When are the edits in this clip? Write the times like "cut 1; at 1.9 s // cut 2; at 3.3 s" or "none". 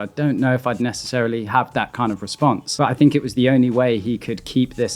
cut 1; at 2.7 s